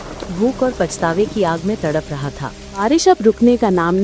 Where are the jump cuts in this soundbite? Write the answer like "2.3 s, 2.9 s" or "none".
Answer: 2.8 s